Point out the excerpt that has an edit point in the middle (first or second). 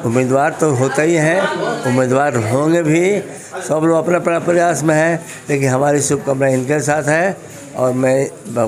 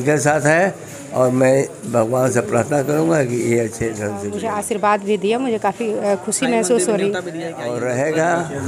second